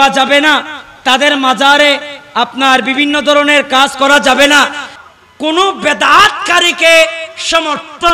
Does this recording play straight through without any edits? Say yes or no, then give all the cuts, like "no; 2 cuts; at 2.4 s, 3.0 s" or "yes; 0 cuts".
no; 1 cut; at 5.0 s